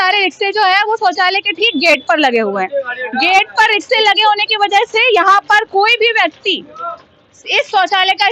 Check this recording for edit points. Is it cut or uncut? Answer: uncut